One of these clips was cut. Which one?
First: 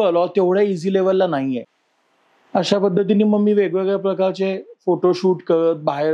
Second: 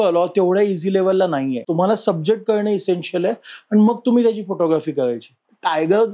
second; 2 cuts; at 1.6 s, 5.3 s

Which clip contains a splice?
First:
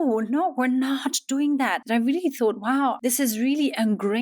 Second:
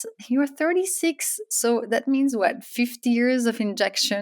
first; 2 cuts; at 1.8 s, 3.0 s

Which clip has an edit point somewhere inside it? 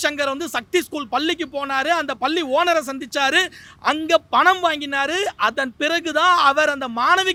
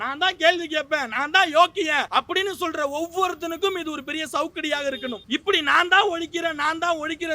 second; 2 cuts; at 2.1 s, 5.2 s

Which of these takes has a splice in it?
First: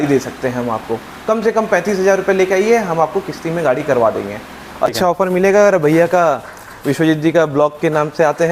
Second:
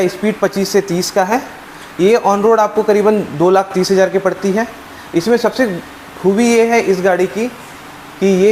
first; 1 cut; at 4.9 s

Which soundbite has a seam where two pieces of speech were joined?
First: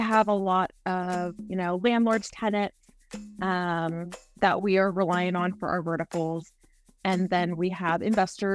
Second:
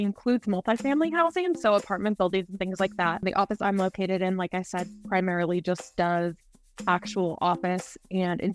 second; 1 cut; at 3.2 s

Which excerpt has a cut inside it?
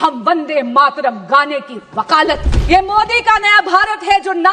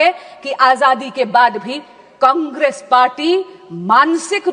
first; 1 cut; at 2.4 s

